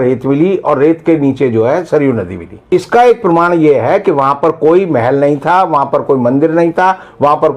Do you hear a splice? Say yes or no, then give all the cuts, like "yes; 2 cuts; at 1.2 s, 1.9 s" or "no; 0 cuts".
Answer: yes; 1 cut; at 2.7 s